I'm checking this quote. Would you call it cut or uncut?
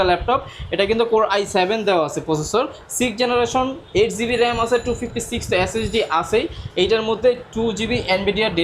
uncut